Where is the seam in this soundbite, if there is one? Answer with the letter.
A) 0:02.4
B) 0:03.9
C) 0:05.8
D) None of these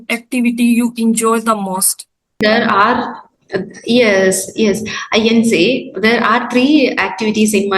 A